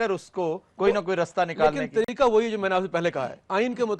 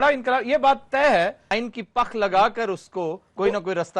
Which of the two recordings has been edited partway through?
second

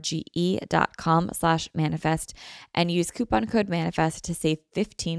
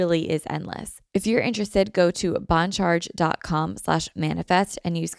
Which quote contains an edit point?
second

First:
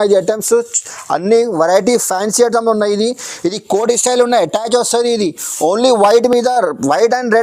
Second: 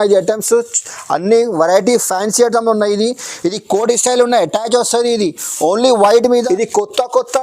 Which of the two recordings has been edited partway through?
second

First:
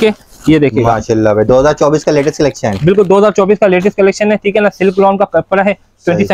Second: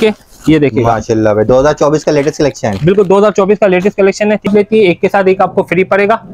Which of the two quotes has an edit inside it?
second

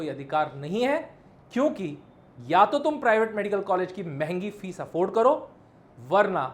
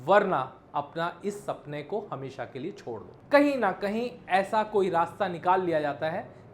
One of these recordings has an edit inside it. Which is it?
second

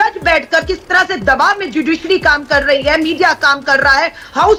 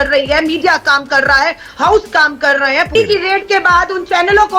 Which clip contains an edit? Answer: second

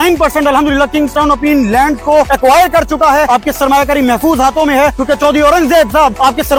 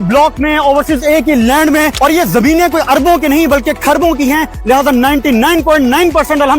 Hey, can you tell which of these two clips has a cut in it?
second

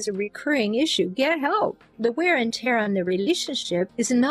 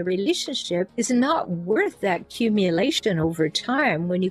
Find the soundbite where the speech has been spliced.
first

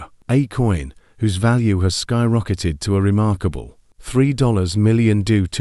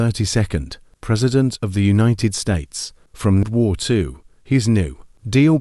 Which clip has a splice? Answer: second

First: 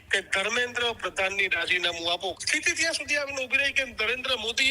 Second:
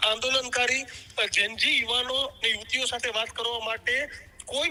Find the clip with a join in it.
first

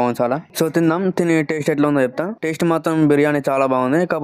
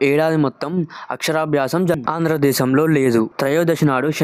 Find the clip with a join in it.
second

